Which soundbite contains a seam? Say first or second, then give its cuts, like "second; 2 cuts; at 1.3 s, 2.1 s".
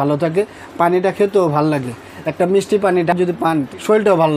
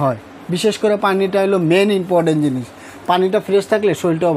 first; 1 cut; at 3.2 s